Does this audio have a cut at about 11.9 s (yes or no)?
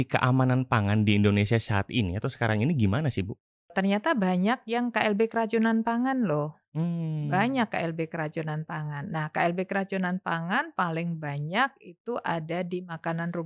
no